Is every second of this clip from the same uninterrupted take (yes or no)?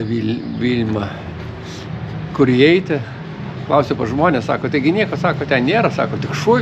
yes